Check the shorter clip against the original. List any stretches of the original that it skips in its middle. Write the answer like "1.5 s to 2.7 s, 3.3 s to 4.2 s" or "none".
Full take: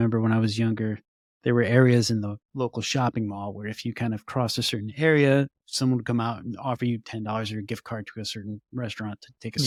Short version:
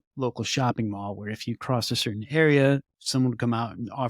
4.0 s to 4.3 s